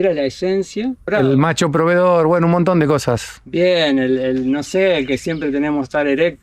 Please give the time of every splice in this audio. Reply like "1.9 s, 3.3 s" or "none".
1.1 s